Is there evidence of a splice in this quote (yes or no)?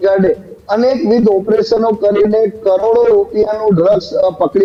no